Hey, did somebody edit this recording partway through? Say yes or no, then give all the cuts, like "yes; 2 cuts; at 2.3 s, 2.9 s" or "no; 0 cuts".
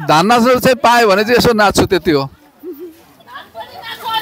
no; 0 cuts